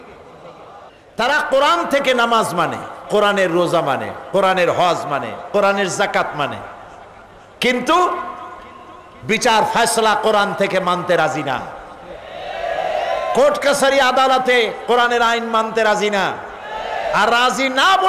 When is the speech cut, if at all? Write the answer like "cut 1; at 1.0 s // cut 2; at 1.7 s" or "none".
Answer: cut 1; at 1.0 s